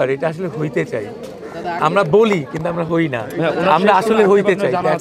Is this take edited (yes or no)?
no